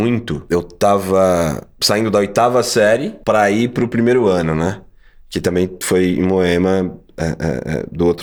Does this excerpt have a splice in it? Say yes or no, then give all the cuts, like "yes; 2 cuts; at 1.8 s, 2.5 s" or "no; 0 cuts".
no; 0 cuts